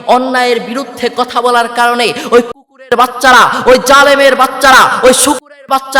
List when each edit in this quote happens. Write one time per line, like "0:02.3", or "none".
none